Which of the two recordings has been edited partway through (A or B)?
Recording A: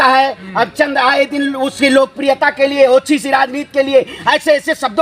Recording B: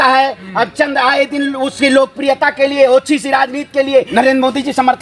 B